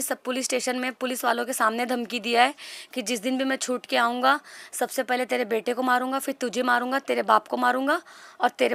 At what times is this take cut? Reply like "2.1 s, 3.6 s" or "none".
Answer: none